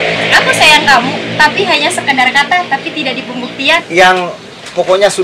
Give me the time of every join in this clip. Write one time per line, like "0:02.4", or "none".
0:03.9

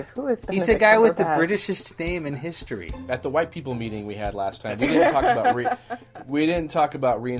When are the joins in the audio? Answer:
0:02.9

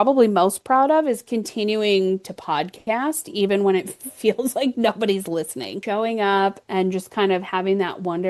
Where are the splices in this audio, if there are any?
0:05.8

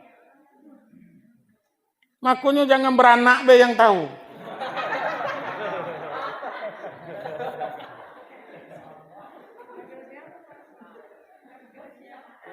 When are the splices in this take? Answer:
0:05.5

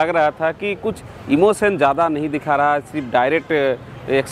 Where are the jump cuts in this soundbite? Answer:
none

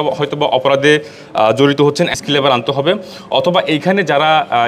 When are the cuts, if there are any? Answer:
0:02.1

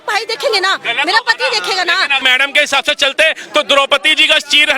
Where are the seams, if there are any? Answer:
0:02.2

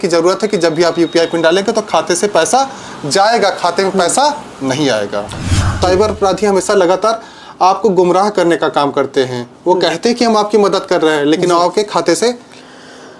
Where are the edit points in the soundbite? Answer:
0:05.7

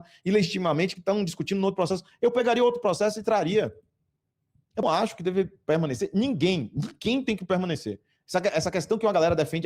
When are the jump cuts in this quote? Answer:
0:04.8

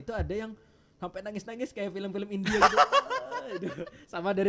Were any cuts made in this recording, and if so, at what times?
none

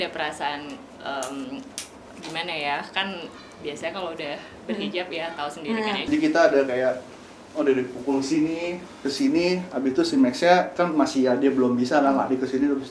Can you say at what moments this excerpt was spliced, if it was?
0:06.0

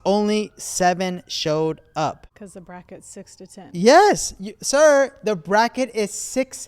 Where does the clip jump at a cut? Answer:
0:02.3

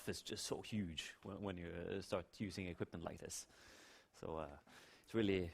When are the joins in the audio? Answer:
0:02.7

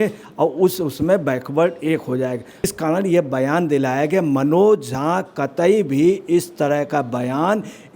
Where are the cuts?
0:02.6

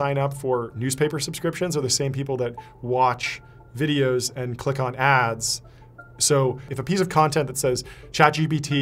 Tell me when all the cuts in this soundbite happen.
0:06.7

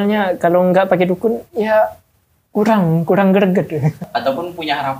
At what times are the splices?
0:04.0

